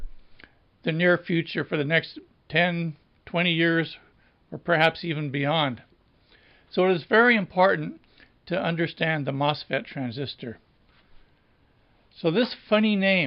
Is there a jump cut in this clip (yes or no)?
yes